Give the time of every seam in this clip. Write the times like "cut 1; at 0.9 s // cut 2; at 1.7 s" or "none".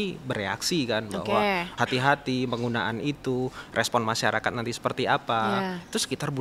cut 1; at 1.7 s